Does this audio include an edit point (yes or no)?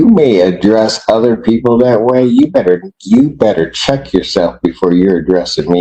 no